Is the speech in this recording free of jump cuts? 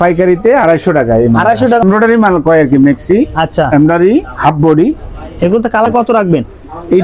no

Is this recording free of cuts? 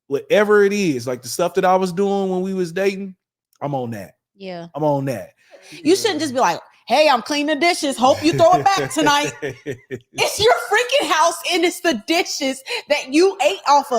no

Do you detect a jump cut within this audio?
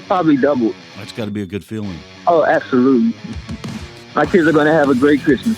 yes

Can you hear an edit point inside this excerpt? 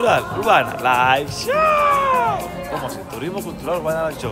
no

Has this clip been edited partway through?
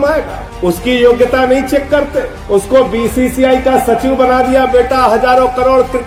no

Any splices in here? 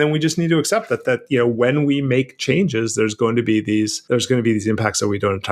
yes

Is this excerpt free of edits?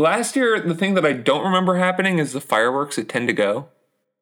yes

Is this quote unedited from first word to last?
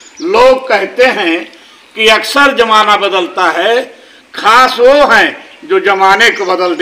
yes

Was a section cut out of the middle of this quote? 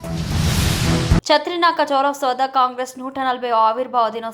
yes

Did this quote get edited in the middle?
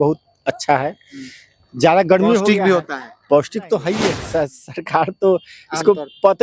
yes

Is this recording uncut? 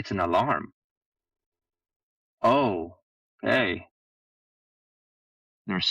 yes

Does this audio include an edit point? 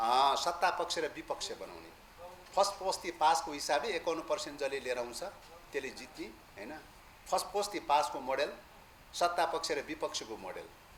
no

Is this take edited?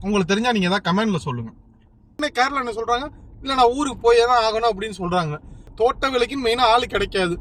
yes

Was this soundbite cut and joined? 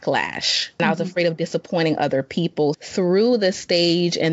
yes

